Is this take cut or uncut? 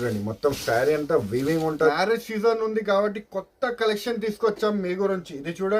cut